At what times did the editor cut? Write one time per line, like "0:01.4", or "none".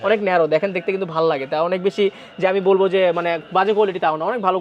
none